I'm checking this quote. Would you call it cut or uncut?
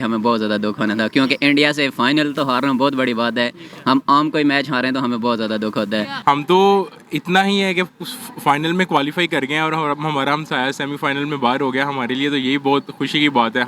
cut